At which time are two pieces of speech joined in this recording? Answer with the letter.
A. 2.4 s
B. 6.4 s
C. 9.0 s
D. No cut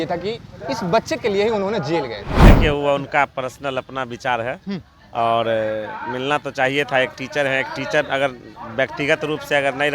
A